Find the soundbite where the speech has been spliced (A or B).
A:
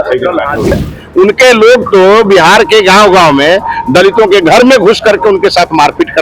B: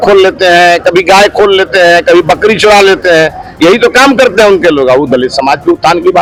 A